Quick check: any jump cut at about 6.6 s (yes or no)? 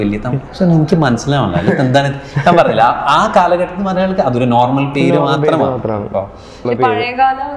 yes